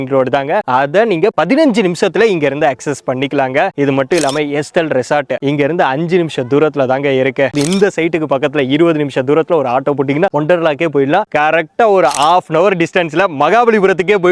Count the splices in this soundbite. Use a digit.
2